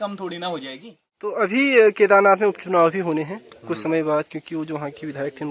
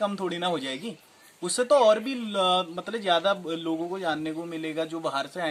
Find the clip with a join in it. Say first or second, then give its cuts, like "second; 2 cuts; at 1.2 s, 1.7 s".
first; 1 cut; at 1.3 s